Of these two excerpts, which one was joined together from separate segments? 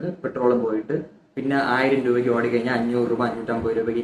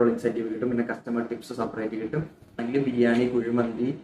second; 1 cut; at 2.7 s

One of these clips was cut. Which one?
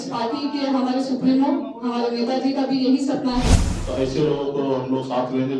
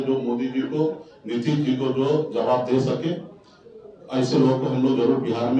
first; 1 cut; at 3.8 s

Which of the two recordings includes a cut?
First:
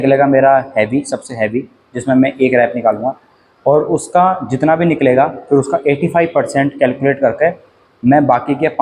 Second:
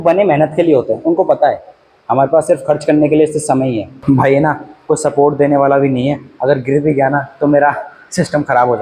second; 1 cut; at 3.9 s

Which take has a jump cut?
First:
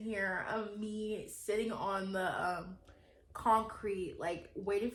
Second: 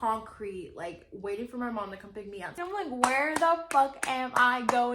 second; 1 cut; at 2.5 s

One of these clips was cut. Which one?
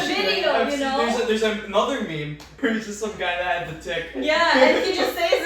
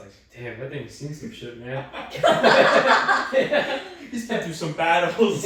first; 1 cut; at 2.5 s

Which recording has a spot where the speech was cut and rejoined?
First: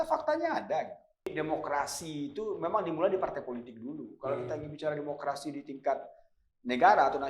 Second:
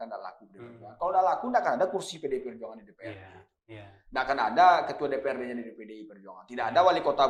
first; 1 cut; at 1.3 s

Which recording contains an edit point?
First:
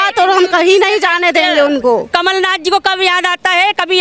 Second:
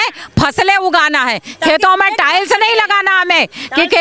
first; 1 cut; at 2.1 s

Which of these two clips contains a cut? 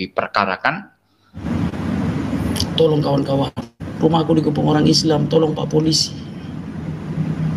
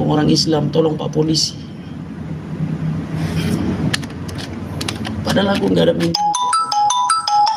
first; 1 cut; at 1.4 s

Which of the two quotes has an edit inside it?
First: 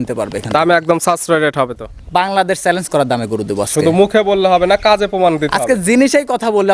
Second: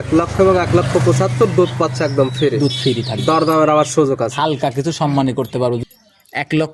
second; 1 cut; at 5.8 s

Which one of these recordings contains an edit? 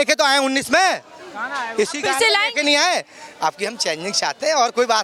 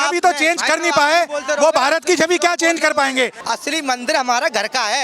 second; 1 cut; at 3.4 s

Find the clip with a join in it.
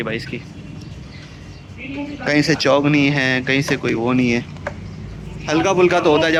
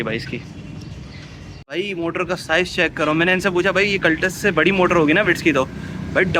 second; 1 cut; at 1.6 s

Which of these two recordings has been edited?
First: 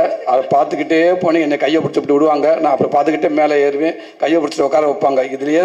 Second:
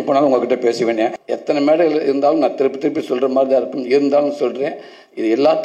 second; 1 cut; at 1.2 s

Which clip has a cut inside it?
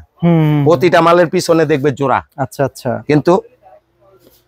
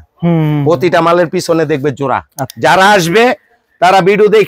second; 1 cut; at 2.4 s

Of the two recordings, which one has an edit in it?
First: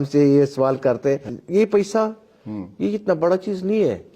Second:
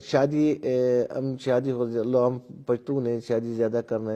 first; 1 cut; at 1.3 s

